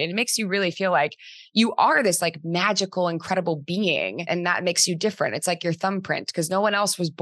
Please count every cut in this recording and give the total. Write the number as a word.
one